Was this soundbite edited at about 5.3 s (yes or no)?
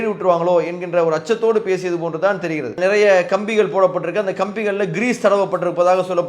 no